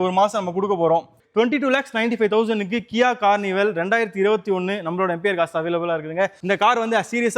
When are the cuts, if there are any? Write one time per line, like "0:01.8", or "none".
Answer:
0:01.2
0:06.4